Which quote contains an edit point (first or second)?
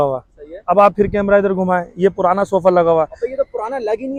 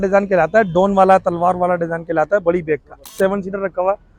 second